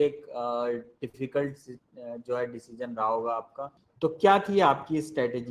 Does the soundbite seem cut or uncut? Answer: cut